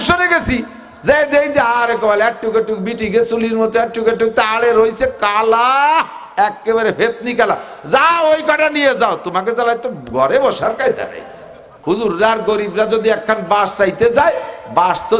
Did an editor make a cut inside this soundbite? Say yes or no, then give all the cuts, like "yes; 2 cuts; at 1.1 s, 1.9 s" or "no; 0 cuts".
yes; 1 cut; at 11.7 s